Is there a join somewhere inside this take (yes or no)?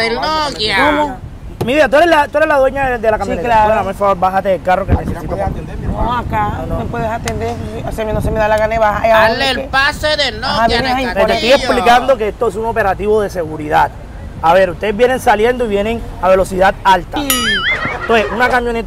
no